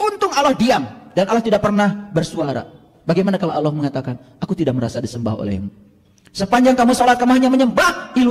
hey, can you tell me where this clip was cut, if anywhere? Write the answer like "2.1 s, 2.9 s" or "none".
none